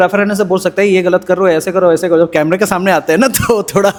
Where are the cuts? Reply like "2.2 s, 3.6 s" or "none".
none